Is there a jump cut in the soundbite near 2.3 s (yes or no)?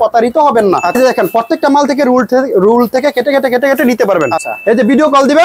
no